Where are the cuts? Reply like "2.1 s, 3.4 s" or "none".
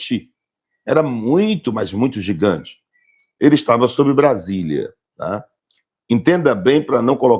none